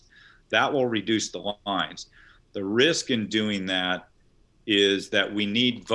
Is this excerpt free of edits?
yes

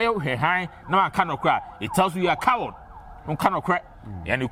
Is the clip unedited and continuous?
yes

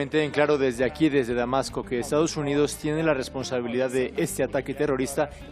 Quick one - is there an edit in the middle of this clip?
no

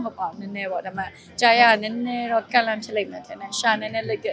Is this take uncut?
yes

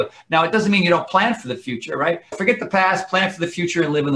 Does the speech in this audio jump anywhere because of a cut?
no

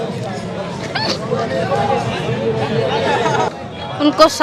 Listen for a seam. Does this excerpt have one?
yes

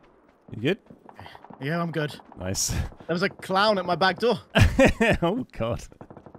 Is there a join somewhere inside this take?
no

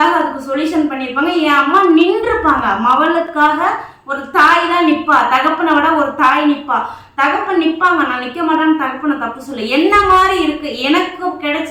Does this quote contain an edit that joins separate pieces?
no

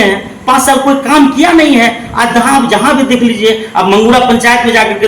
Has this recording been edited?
no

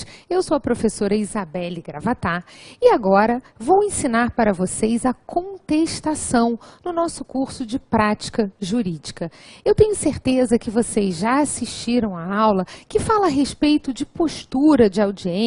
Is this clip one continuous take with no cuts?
yes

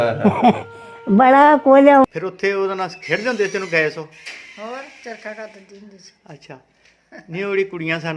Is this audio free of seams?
no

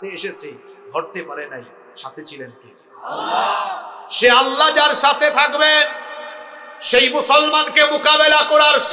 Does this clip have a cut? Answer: no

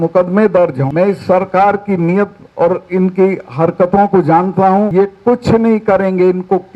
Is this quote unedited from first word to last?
no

